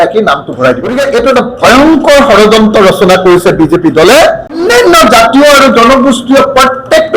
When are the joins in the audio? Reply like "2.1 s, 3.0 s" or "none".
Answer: 1.0 s, 4.6 s